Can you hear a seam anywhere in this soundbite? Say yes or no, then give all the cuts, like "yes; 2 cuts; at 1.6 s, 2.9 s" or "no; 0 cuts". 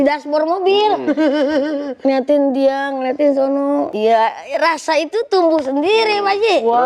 yes; 1 cut; at 3.9 s